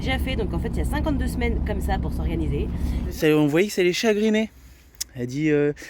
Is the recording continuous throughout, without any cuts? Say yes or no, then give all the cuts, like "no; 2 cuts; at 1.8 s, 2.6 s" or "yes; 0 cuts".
no; 1 cut; at 3.2 s